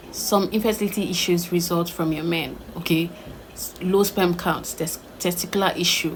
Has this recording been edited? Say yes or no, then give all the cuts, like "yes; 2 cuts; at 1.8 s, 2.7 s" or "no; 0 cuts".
no; 0 cuts